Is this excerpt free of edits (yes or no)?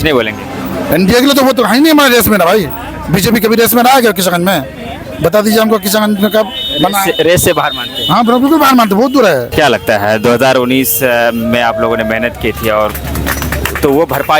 yes